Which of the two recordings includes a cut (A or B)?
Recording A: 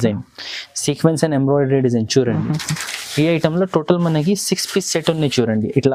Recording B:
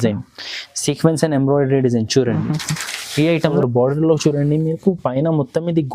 B